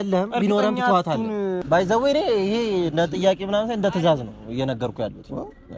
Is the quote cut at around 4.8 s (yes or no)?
no